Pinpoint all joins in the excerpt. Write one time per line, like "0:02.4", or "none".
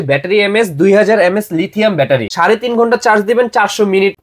0:02.3